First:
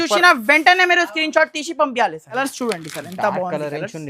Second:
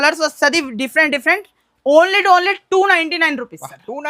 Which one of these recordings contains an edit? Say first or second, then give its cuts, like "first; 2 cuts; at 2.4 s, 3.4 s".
first; 1 cut; at 2.4 s